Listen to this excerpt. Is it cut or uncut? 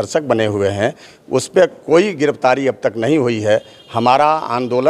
uncut